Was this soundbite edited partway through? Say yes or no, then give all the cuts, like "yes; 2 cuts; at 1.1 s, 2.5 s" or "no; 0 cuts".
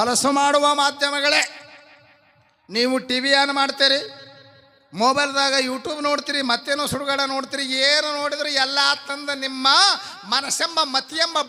no; 0 cuts